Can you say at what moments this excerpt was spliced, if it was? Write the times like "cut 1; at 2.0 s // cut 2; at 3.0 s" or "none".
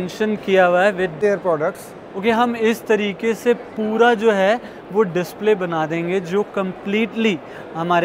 cut 1; at 1.2 s